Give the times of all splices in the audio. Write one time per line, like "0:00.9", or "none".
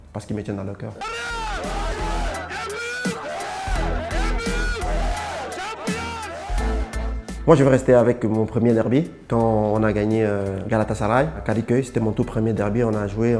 0:07.3